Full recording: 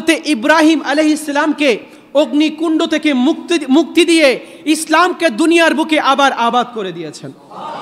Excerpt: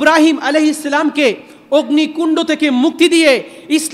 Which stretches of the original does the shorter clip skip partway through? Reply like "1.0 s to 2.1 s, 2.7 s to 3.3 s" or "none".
3.4 s to 3.9 s